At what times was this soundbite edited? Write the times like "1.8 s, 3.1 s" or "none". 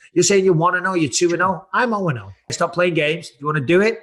2.5 s